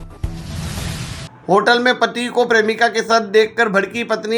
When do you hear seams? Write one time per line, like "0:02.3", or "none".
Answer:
0:01.2